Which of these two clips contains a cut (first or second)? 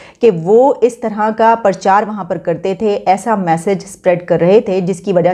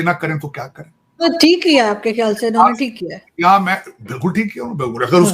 second